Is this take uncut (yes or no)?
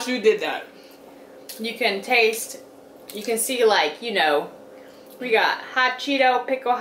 no